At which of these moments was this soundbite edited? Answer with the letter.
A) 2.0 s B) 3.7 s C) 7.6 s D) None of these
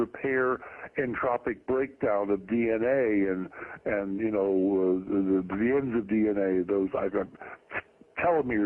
C